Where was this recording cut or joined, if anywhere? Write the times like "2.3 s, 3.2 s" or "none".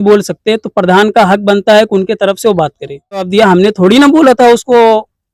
3.3 s